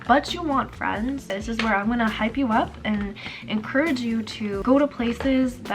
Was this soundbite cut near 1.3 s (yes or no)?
yes